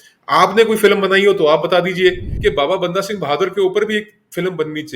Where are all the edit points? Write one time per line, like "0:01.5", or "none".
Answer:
0:02.3